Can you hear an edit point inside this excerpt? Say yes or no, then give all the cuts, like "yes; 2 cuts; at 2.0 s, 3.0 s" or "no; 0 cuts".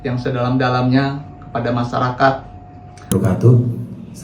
yes; 1 cut; at 3.1 s